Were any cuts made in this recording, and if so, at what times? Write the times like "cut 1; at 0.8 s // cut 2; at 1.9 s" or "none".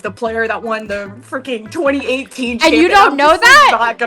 none